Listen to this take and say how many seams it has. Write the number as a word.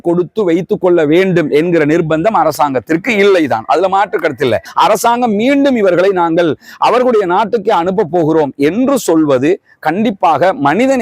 one